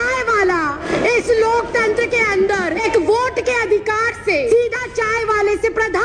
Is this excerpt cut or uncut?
cut